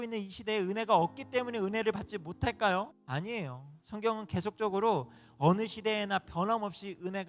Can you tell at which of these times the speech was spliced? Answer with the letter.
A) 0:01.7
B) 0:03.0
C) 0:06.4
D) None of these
B